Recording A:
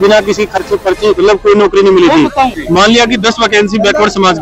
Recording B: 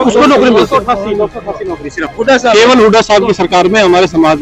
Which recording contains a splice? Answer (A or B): A